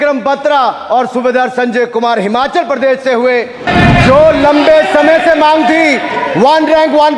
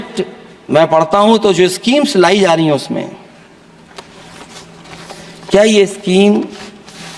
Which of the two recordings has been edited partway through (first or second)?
first